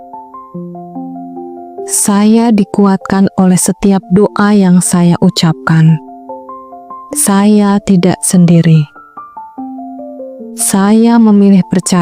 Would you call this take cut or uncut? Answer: cut